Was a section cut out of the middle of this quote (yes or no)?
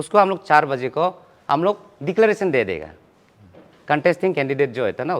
no